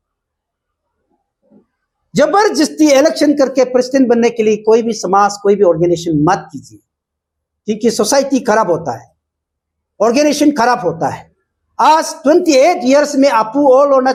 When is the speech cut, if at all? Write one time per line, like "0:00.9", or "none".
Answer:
none